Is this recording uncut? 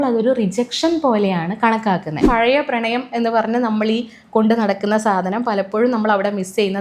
no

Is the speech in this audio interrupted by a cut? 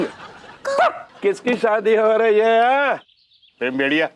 yes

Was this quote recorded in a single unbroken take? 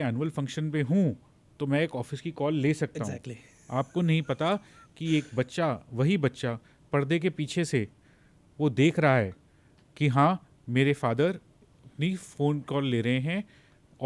yes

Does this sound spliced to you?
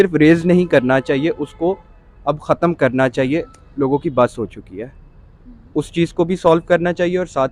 no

